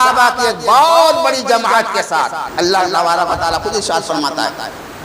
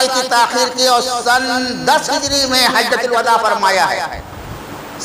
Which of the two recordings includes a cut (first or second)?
first